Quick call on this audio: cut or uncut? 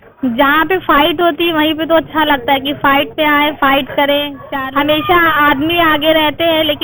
cut